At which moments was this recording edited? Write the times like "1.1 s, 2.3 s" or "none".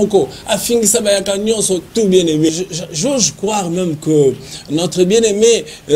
2.5 s